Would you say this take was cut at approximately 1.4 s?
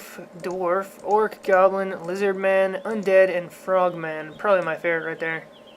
yes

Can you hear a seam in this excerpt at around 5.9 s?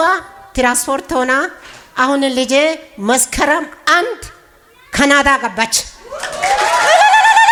no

